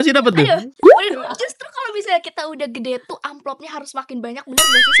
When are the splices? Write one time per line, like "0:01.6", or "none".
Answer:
none